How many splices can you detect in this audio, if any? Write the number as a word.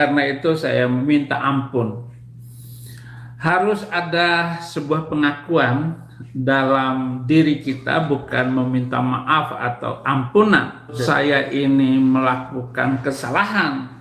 one